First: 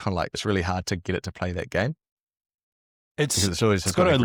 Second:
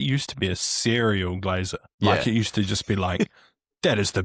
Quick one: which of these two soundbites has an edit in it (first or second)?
second